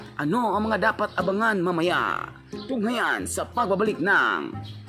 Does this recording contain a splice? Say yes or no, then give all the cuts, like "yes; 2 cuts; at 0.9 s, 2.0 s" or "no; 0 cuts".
no; 0 cuts